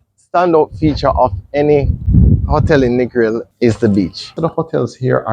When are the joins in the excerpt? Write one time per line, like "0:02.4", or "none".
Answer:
0:02.0
0:03.5
0:04.4